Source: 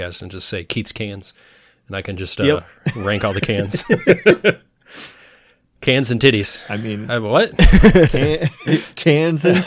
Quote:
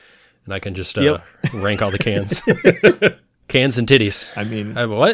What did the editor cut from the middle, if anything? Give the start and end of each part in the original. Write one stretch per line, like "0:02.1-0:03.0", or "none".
0:04.7-0:05.6